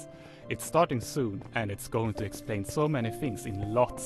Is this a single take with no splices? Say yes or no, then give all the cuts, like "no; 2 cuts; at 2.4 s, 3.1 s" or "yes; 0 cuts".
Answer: yes; 0 cuts